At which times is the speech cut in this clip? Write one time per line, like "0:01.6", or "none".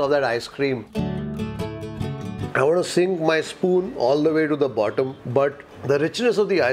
0:00.9
0:02.4